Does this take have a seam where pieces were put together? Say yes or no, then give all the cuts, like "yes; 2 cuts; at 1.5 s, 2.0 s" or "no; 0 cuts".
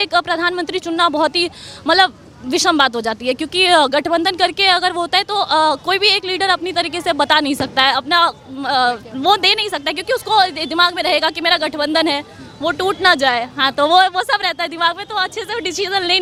no; 0 cuts